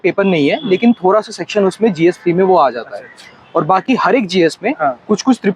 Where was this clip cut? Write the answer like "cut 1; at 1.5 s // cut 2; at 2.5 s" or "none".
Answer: none